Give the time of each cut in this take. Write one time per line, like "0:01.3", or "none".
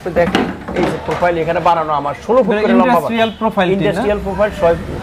none